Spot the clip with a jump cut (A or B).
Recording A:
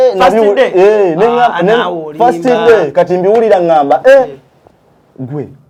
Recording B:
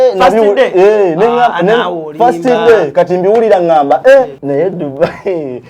B